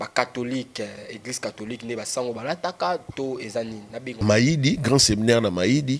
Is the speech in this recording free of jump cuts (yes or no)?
no